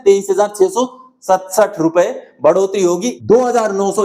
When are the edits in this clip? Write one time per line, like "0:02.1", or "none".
0:03.1